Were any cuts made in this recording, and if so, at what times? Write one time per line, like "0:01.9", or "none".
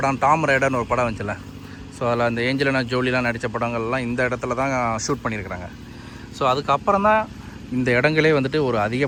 none